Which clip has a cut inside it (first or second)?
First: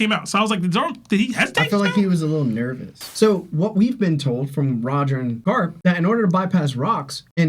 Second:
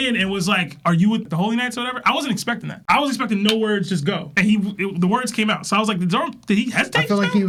first